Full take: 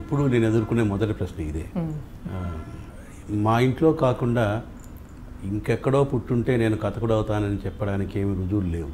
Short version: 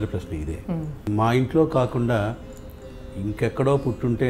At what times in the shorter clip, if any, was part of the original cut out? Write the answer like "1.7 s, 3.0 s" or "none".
1.0 s